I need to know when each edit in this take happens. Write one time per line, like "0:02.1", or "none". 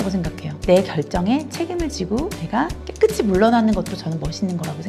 none